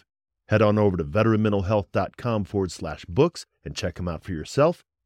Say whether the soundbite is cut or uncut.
uncut